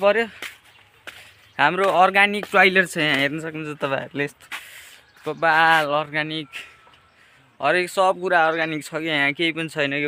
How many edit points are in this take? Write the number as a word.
zero